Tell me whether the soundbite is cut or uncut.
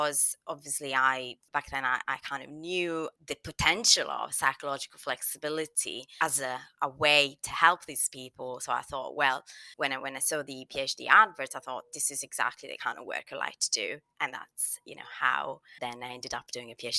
cut